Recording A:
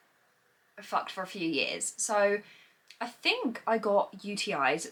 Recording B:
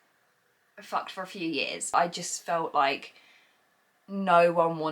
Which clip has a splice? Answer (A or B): B